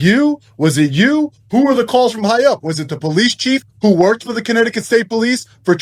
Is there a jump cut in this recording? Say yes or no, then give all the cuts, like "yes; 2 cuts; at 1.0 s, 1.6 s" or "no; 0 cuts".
no; 0 cuts